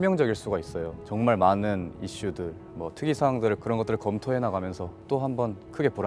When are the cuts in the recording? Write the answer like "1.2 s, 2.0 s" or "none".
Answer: 1.0 s, 3.6 s, 5.0 s